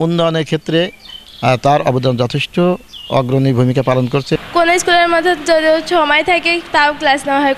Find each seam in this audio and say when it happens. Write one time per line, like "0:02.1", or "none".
0:04.4